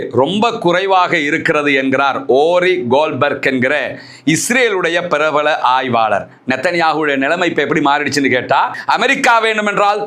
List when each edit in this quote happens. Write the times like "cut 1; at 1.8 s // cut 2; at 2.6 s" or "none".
cut 1; at 8.7 s